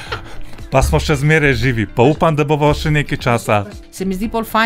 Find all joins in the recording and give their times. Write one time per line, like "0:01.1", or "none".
0:03.6